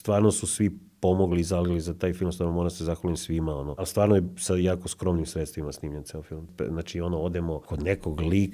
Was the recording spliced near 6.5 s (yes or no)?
yes